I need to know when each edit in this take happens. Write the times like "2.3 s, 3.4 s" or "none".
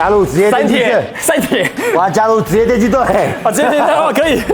none